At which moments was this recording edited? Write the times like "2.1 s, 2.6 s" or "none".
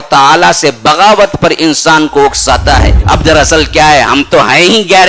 2.9 s

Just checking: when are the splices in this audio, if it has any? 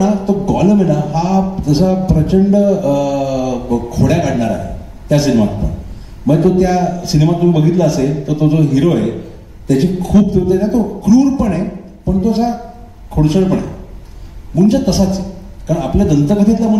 none

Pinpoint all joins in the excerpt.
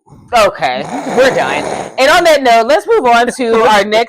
none

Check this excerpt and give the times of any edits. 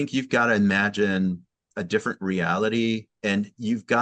1.7 s, 3.1 s

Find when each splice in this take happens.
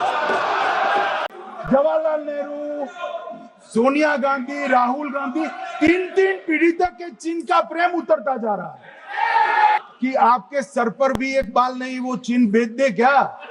1.3 s, 9.8 s

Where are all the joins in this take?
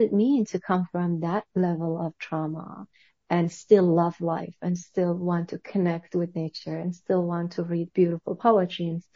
none

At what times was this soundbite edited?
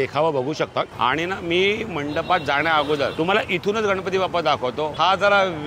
0.9 s

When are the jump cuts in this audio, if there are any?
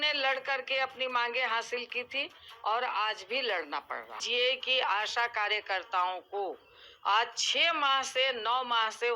4.2 s

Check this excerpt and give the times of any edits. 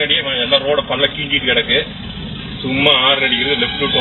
none

